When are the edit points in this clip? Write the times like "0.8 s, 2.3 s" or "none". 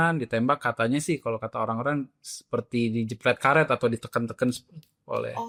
none

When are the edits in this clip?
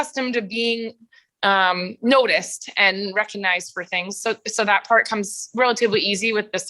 none

